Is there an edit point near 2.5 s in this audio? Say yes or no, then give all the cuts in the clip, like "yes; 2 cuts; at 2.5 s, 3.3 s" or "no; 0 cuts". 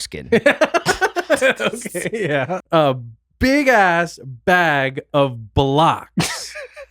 yes; 1 cut; at 2.5 s